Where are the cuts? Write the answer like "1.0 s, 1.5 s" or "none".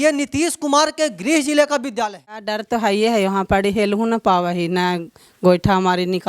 2.5 s